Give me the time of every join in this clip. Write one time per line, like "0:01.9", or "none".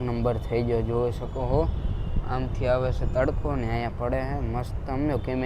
none